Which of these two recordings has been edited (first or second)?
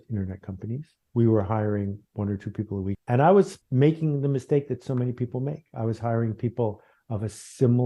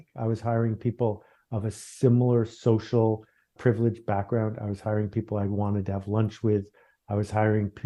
first